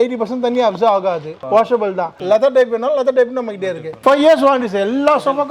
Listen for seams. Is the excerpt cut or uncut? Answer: cut